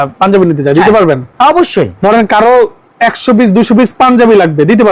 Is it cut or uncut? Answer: cut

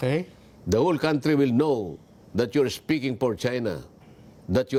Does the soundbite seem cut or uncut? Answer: uncut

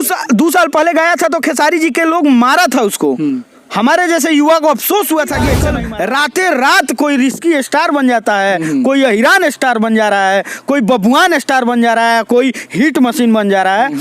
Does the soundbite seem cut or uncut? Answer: cut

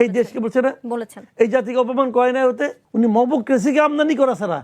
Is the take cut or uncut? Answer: cut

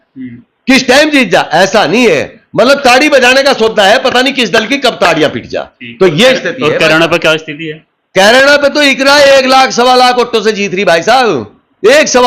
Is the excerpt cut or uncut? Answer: uncut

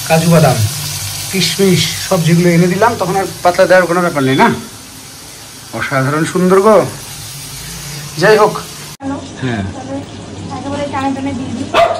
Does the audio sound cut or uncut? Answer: cut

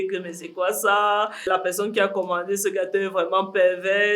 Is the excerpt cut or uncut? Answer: cut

